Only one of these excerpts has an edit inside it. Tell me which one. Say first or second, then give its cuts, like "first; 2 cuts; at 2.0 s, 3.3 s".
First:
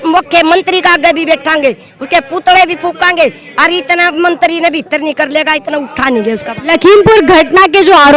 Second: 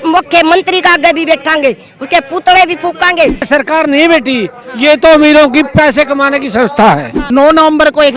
second; 2 cuts; at 3.5 s, 7.1 s